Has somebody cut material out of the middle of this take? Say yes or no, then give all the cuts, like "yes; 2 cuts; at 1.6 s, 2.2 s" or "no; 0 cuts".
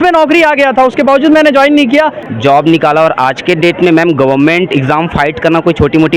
yes; 1 cut; at 2.2 s